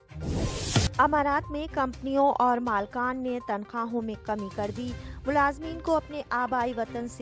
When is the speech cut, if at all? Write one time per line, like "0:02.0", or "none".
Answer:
0:00.9